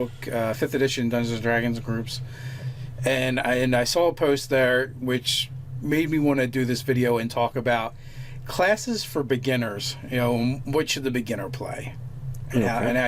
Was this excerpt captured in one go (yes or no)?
no